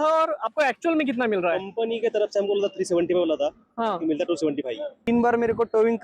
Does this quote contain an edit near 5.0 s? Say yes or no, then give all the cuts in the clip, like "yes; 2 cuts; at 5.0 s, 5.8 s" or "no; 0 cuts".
yes; 1 cut; at 5.0 s